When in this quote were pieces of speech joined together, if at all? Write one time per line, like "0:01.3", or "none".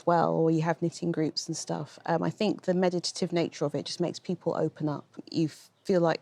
0:05.2